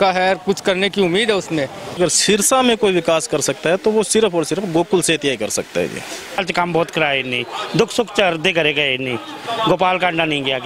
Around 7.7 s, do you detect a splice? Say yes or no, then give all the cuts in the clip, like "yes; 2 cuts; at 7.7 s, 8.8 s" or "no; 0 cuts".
no; 2 cuts; at 2.0 s, 6.4 s